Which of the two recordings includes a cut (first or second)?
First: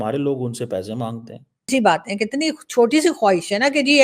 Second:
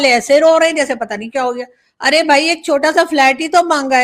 first